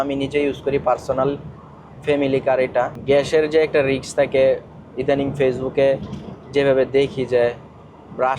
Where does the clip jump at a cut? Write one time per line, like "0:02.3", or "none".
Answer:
0:03.0